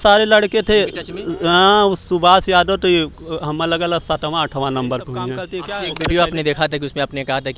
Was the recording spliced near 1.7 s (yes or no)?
no